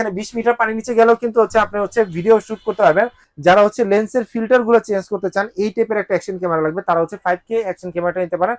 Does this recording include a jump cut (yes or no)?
yes